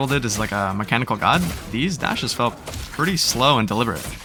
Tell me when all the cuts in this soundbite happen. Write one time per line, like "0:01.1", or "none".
none